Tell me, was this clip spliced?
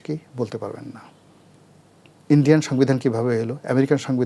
no; 0 cuts

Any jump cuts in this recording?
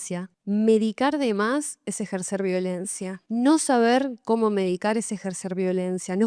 no; 0 cuts

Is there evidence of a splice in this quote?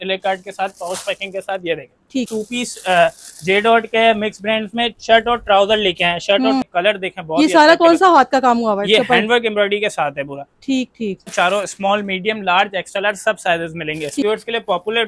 yes; 4 cuts; at 2.3 s, 6.6 s, 11.3 s, 14.2 s

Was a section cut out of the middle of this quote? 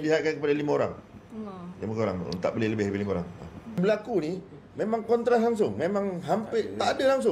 no; 0 cuts

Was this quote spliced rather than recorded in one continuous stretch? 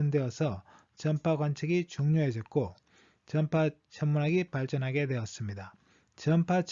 yes; 1 cut; at 2.2 s

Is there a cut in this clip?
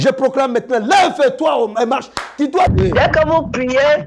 yes; 1 cut; at 2.7 s

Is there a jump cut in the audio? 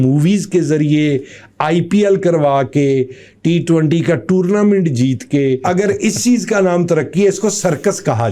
yes; 1 cut; at 5.6 s

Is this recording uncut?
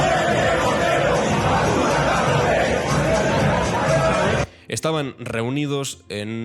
yes; 0 cuts

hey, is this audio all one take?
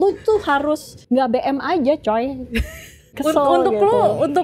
no; 2 cuts; at 0.9 s, 3.1 s

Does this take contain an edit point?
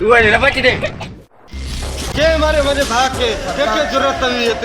yes; 1 cut; at 1.2 s

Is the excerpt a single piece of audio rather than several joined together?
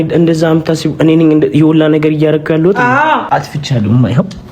no; 1 cut; at 3.2 s

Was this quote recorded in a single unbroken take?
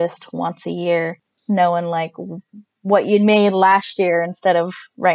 no; 1 cut; at 1.3 s

